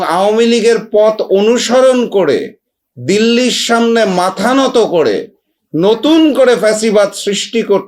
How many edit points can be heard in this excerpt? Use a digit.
0